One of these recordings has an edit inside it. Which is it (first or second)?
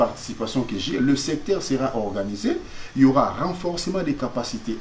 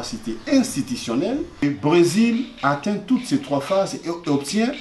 second